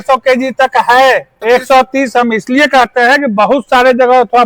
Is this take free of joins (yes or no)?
no